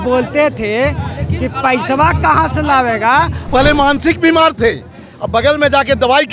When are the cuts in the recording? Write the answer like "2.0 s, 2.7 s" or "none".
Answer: 3.4 s